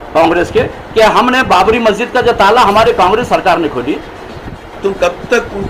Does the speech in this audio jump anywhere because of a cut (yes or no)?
yes